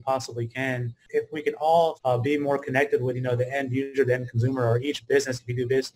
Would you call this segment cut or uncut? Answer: cut